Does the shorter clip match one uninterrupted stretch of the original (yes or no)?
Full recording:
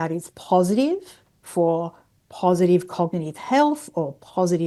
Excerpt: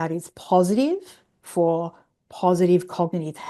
yes